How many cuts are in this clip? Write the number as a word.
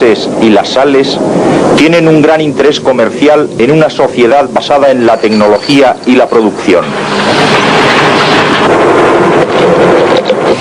one